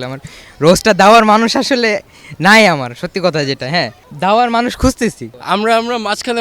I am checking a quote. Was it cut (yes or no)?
yes